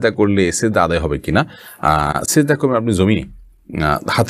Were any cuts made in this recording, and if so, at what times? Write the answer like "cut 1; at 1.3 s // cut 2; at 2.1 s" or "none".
none